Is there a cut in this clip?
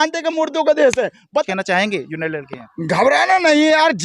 yes; 1 cut; at 1.5 s

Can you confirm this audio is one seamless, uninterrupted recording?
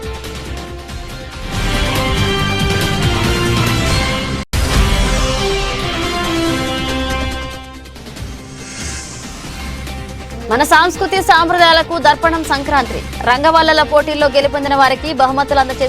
yes; 0 cuts

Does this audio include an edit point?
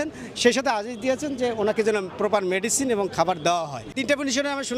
no; 0 cuts

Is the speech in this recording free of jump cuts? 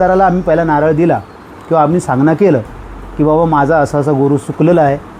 yes; 0 cuts

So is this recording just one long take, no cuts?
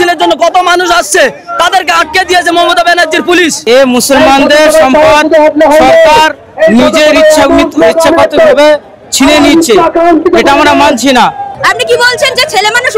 no; 2 cuts; at 3.6 s, 11.5 s

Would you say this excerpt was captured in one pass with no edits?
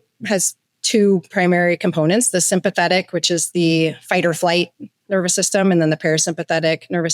yes; 0 cuts

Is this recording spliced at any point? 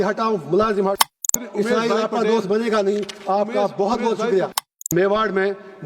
yes; 2 cuts; at 1.4 s, 4.9 s

